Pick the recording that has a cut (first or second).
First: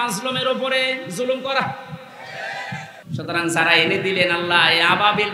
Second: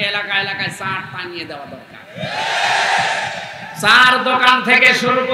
first